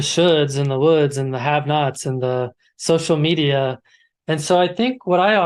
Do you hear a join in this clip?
no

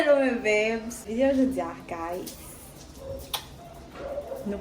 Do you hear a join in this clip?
yes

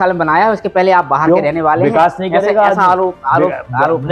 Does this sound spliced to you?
no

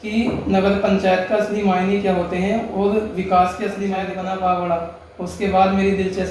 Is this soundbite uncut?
no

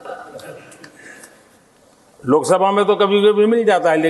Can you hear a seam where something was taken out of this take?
no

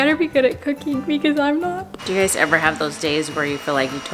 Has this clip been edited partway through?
yes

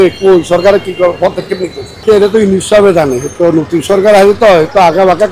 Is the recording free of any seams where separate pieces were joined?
no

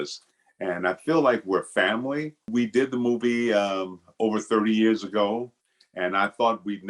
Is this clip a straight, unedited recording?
no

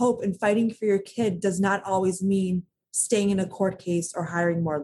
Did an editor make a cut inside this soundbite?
no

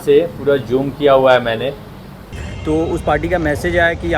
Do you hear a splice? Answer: yes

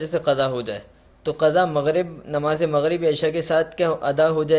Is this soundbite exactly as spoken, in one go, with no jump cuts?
yes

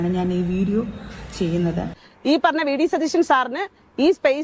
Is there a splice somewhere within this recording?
yes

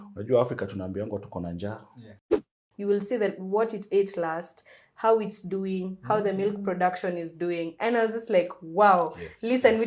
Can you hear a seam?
yes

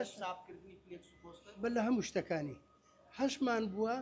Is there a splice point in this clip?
no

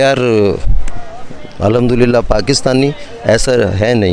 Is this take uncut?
yes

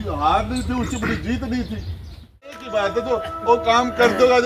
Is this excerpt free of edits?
no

